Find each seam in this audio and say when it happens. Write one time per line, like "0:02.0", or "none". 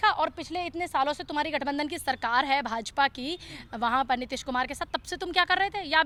none

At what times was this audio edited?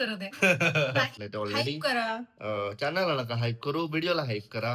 0:01.2

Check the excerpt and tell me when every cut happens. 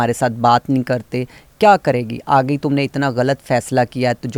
none

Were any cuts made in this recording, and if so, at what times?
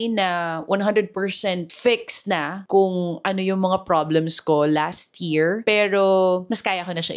none

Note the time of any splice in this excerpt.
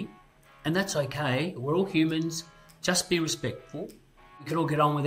none

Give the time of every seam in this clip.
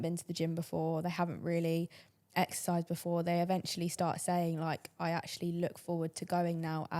none

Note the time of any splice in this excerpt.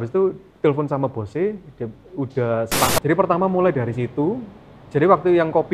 0:03.0

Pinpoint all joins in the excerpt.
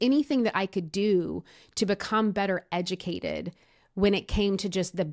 none

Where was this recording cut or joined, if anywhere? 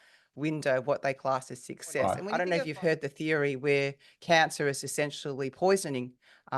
0:02.3

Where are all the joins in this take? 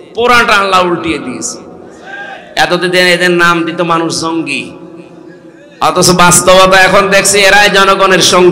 none

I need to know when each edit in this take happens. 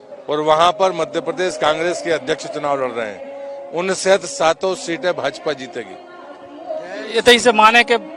none

